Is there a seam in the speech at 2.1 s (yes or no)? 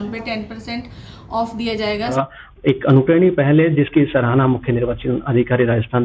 yes